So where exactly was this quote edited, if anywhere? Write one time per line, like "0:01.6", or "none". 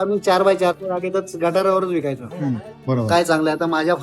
0:02.7